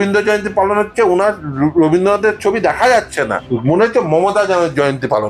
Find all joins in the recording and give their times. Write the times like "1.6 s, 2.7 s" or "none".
3.4 s